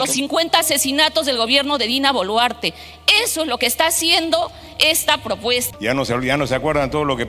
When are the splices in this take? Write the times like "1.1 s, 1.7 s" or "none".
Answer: 5.7 s

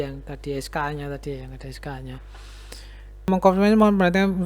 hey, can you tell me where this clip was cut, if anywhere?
3.3 s

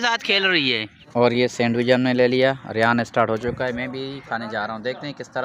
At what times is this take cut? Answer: 0.9 s

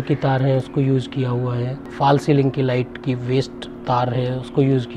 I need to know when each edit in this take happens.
1.9 s

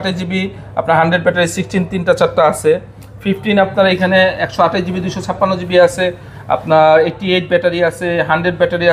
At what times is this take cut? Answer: none

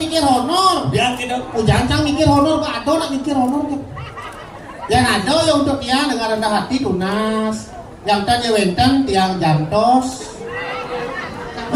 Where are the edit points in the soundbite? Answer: none

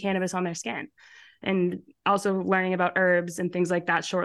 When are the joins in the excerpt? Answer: none

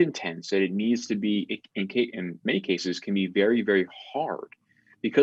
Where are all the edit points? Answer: none

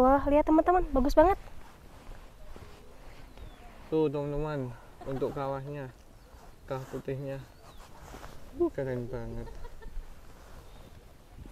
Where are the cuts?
none

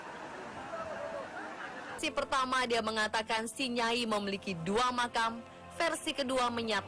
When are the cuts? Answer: none

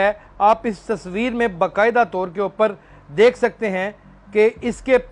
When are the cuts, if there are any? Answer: none

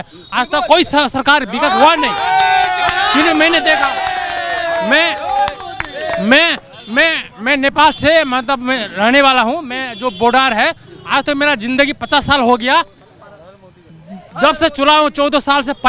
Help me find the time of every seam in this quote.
none

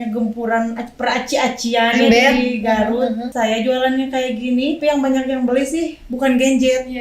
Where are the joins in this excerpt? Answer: 3.3 s, 4.8 s

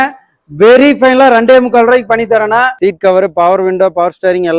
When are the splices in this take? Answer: 2.8 s

